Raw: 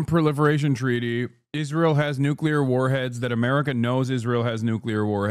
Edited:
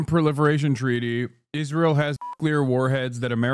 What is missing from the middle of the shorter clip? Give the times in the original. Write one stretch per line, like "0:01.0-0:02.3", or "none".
none

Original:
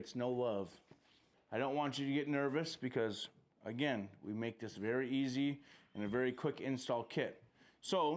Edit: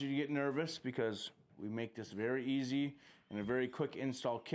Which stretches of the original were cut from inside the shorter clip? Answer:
0:03.5-0:04.2

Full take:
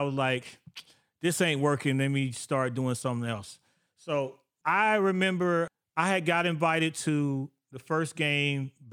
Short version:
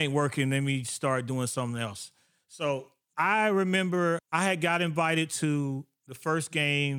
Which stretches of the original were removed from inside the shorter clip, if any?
0:05.7-0:05.9

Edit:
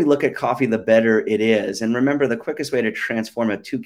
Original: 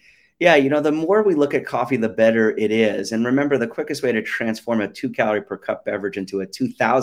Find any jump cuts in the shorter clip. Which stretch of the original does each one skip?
none

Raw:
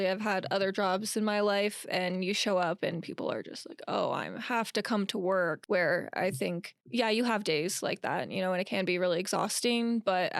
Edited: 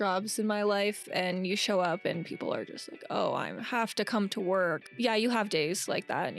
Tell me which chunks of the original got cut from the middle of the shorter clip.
0:05.6-0:06.8

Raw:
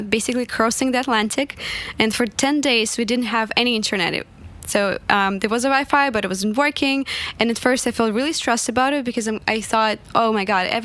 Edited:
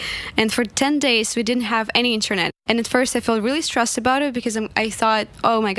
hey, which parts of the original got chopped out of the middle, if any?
0:04.2-0:07.2

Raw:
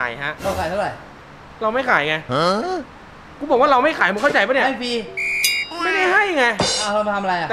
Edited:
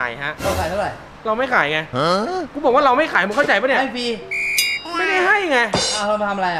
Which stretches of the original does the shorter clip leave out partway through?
0:01.1-0:01.4
0:02.9-0:03.4

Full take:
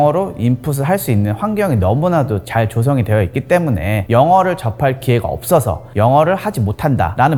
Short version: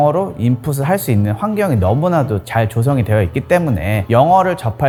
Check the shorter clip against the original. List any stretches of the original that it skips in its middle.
none

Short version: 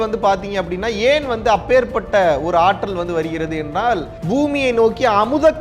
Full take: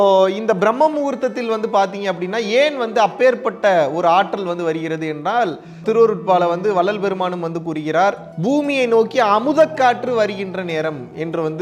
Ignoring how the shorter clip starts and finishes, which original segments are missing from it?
0:05.6-0:08.3

